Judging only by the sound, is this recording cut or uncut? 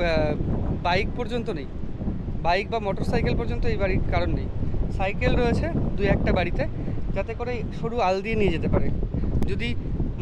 uncut